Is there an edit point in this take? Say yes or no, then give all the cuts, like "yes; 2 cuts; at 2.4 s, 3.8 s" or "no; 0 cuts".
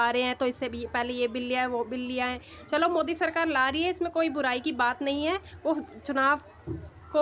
no; 0 cuts